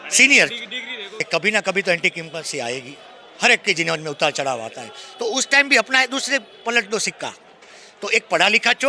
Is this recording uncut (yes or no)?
no